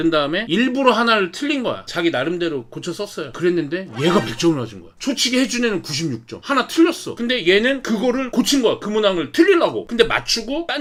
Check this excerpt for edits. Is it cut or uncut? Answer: uncut